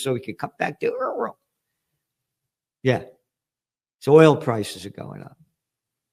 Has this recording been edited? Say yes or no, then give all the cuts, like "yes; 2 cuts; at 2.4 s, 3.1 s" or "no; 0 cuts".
no; 0 cuts